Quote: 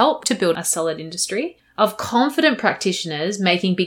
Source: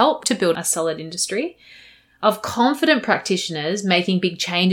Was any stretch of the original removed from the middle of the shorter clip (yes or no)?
yes